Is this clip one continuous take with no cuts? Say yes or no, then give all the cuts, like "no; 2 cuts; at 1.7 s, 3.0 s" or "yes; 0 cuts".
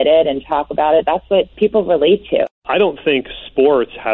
no; 2 cuts; at 1.5 s, 2.5 s